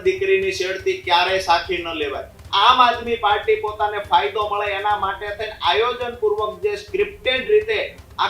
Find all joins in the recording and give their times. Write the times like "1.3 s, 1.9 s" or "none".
2.3 s